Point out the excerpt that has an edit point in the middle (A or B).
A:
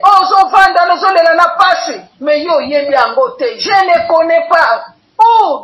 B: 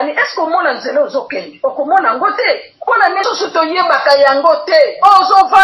B